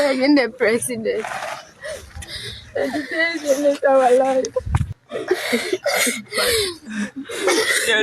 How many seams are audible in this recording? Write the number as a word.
one